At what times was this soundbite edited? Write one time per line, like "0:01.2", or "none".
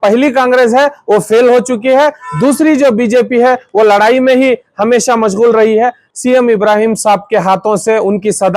0:06.1